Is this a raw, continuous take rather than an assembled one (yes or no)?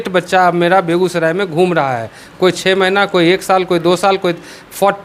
yes